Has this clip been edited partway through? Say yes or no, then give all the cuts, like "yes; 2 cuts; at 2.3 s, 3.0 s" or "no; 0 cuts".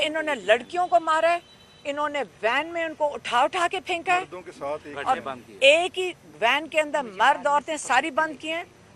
no; 0 cuts